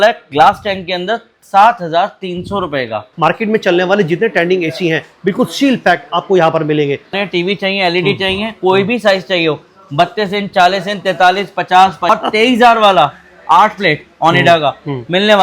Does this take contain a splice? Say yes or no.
yes